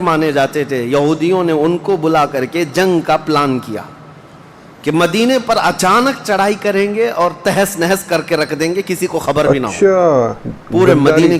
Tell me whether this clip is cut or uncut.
uncut